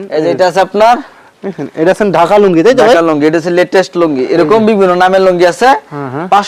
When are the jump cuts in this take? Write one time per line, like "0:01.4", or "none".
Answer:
none